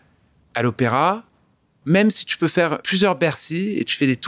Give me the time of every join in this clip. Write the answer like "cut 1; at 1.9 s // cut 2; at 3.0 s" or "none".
cut 1; at 1.7 s // cut 2; at 2.8 s